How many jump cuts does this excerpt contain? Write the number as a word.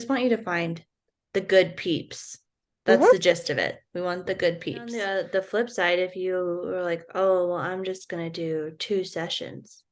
one